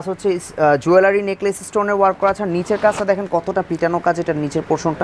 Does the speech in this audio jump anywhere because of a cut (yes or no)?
no